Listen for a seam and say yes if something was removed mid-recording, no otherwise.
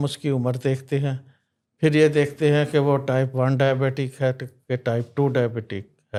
no